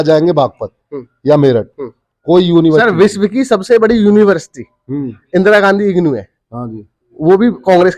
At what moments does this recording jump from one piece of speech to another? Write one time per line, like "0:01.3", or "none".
none

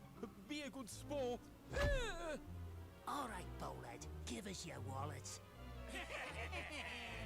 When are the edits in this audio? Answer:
none

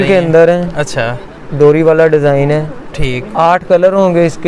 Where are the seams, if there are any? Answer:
none

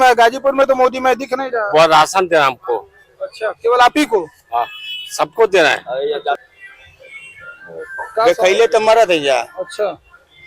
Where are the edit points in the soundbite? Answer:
0:06.4

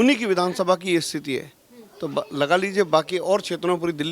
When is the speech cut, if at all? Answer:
none

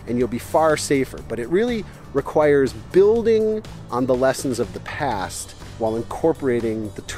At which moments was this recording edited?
none

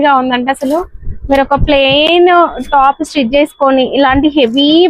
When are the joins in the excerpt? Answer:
none

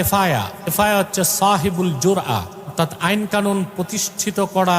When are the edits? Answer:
0:00.8
0:02.7

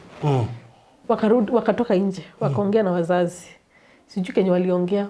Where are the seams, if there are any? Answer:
0:01.0

